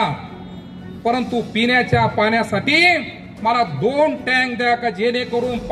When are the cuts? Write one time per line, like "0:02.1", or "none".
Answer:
none